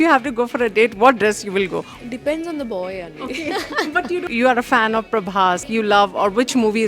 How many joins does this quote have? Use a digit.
3